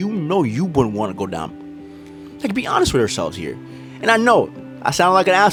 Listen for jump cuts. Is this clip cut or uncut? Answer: uncut